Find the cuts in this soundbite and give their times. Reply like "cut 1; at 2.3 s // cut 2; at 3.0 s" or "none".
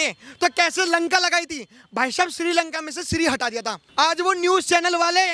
cut 1; at 3.7 s